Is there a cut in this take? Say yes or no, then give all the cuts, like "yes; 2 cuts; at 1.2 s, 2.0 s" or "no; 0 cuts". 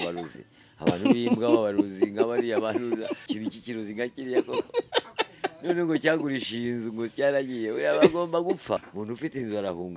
yes; 2 cuts; at 3.3 s, 8.8 s